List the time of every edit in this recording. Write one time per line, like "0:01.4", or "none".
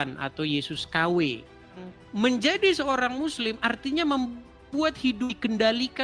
0:01.8